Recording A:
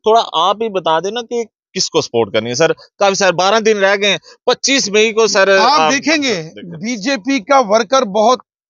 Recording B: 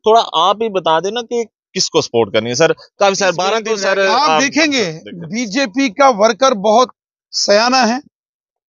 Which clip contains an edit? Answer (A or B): B